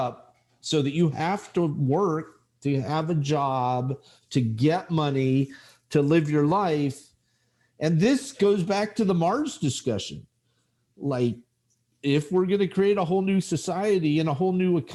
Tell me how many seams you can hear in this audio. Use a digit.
0